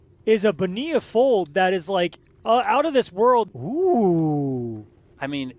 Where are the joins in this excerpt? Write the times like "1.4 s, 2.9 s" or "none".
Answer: 3.5 s